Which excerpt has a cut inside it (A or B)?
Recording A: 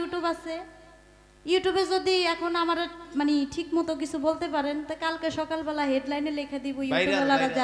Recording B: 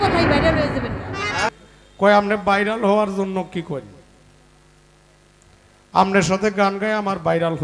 B